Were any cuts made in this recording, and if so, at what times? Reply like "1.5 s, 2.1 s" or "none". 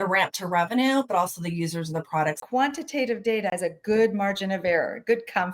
2.4 s, 3.5 s